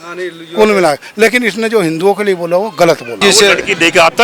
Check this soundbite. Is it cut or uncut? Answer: cut